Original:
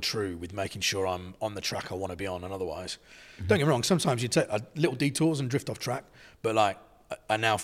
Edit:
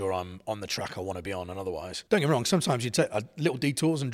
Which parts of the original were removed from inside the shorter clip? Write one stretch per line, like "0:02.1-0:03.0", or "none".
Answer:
0:02.9-0:03.3